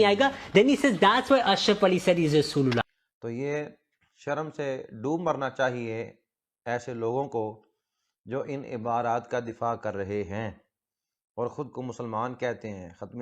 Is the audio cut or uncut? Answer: cut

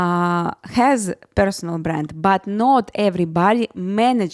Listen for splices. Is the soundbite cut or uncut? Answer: uncut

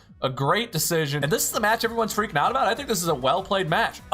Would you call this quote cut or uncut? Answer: cut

